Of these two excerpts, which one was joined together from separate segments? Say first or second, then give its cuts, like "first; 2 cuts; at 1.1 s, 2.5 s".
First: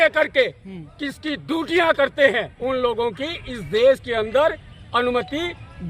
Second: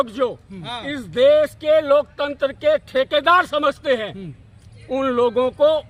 first; 1 cut; at 2.5 s